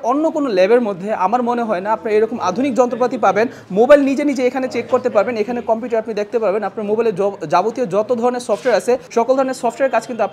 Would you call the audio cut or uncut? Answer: uncut